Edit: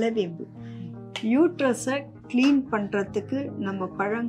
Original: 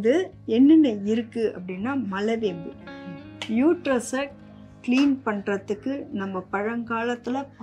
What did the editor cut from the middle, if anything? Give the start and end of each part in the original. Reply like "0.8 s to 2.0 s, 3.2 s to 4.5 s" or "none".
4.4 s to 4.7 s